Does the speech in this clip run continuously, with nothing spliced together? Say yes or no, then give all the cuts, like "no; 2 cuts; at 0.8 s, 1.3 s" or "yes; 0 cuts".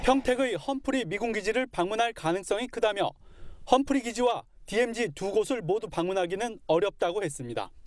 yes; 0 cuts